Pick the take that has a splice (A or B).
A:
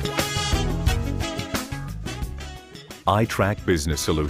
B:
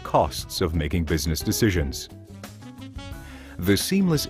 A